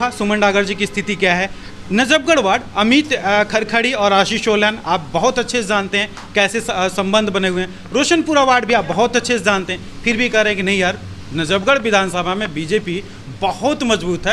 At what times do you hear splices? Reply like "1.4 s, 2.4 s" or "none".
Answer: none